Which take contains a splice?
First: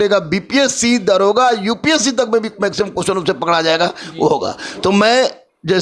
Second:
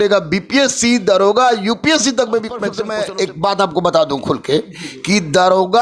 second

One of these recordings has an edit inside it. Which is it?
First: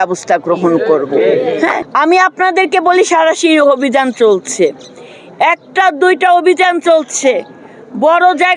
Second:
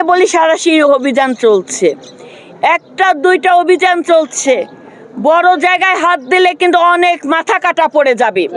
first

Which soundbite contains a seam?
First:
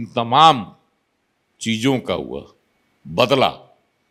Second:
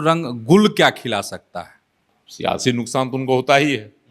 second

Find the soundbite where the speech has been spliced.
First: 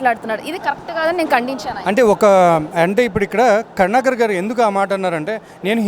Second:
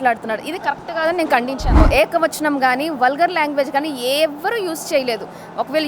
second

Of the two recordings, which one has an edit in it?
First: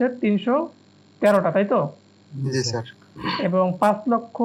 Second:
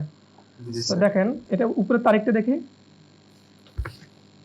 second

